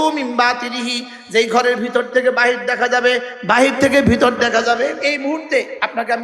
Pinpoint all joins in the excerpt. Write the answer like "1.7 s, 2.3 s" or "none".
5.0 s